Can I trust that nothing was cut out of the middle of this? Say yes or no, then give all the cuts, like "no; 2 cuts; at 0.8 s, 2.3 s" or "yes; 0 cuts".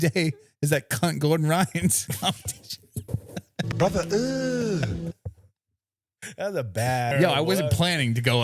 no; 1 cut; at 7.1 s